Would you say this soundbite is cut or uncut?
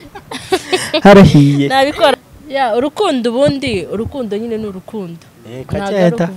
cut